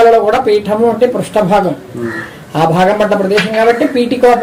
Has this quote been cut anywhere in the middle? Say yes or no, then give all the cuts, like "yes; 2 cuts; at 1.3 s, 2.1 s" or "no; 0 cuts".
no; 0 cuts